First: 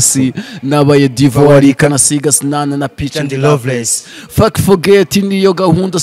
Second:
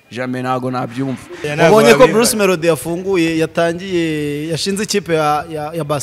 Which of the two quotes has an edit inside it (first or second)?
second